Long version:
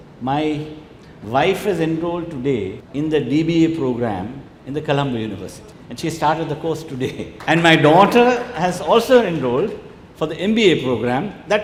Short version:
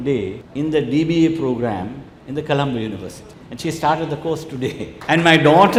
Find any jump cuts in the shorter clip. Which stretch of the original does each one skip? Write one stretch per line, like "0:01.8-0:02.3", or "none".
none